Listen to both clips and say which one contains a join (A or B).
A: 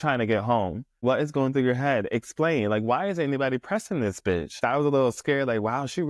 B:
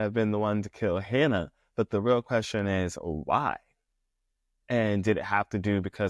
A